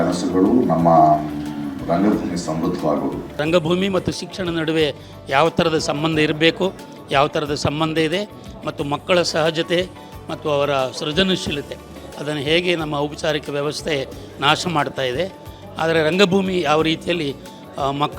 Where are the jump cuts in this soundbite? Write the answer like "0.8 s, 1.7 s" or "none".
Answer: 3.4 s